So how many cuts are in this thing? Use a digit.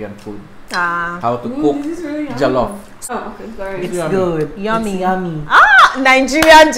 1